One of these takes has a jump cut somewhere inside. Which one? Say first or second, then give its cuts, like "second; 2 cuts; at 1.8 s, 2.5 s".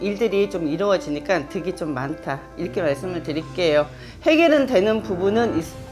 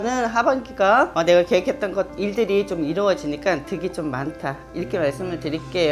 second; 1 cut; at 1.1 s